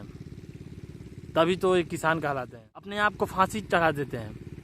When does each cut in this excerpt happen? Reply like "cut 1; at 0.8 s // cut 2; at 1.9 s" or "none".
cut 1; at 2.9 s

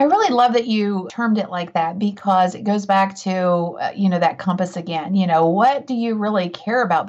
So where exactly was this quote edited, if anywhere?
cut 1; at 1.1 s

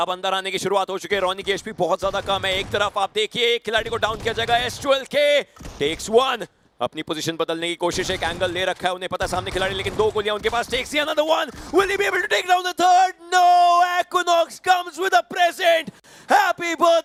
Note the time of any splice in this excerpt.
none

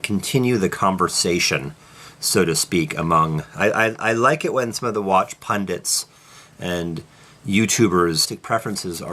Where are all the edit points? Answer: none

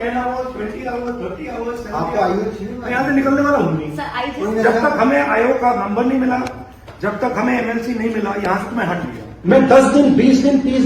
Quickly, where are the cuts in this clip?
cut 1; at 9.2 s

